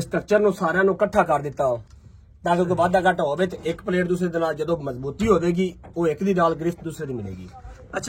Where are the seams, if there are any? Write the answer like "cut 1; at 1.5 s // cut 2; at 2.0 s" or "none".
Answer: none